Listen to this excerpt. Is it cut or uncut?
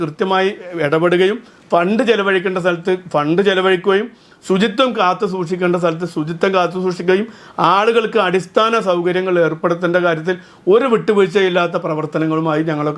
uncut